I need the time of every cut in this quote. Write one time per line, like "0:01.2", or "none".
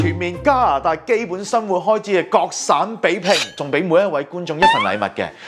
0:03.6